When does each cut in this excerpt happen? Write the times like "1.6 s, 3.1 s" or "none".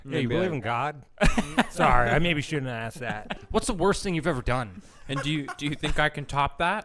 3.3 s

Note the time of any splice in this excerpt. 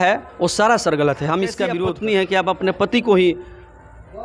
1.7 s

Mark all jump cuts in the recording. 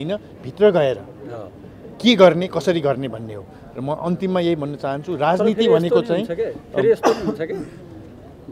none

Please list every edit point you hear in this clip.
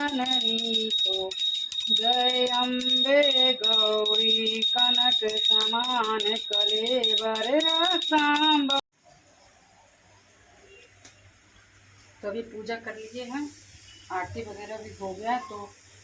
8.8 s

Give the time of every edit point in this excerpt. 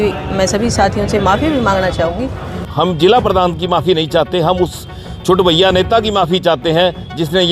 2.6 s

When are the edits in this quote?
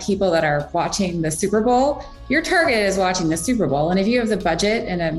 none

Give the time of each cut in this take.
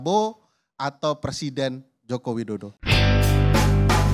2.8 s

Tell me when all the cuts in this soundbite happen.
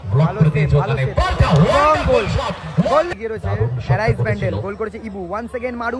3.1 s

